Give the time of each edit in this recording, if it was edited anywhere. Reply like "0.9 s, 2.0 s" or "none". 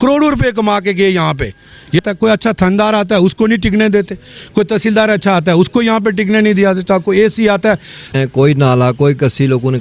2.0 s, 8.1 s